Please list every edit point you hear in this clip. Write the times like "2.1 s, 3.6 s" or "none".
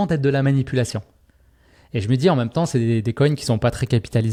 none